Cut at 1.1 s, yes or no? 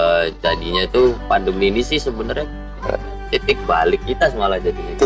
no